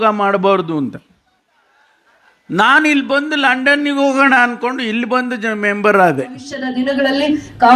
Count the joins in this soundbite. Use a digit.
1